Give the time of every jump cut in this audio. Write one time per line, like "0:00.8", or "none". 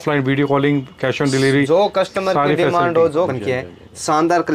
0:03.3